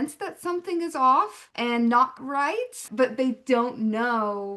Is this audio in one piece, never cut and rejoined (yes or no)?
no